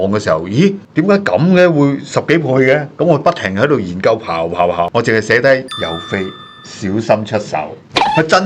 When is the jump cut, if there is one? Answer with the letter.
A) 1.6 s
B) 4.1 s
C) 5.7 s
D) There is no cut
C